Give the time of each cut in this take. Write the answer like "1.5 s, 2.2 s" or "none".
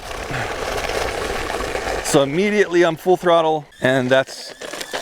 3.7 s